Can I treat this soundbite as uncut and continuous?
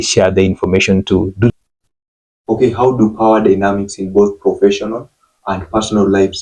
no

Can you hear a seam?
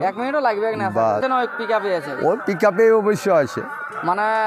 yes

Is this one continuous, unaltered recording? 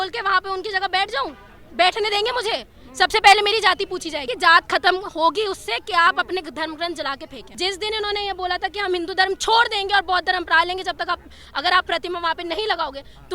no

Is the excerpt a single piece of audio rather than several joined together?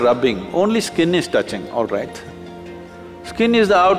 yes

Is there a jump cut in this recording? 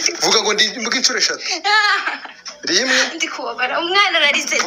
no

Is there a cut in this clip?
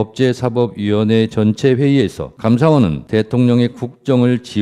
yes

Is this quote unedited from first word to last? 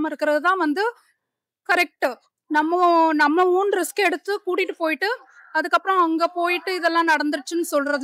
yes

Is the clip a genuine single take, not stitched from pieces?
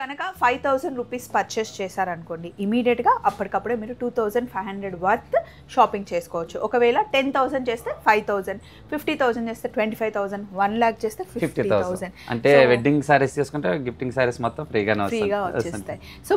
yes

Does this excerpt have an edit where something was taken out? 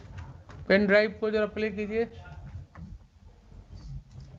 no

